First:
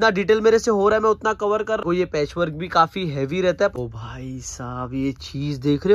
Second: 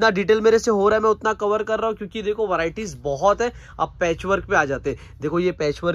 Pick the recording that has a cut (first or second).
first